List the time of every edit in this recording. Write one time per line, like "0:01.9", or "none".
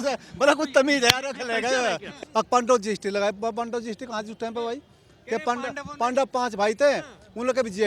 0:02.2